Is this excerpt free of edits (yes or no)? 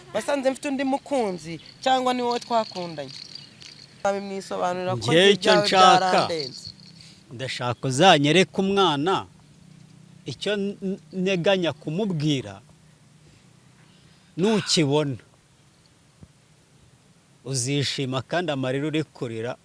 no